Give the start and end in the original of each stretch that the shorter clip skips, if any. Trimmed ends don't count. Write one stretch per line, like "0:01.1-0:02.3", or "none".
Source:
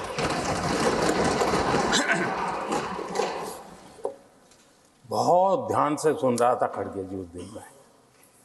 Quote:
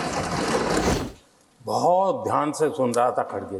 0:01.2-0:04.4